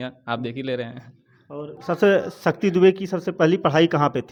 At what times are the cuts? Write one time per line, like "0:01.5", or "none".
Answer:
none